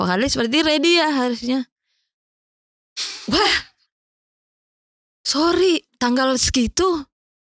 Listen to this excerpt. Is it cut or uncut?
cut